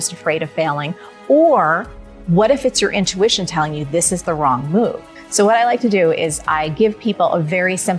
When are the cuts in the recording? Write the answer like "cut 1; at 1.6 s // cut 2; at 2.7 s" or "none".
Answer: cut 1; at 5.1 s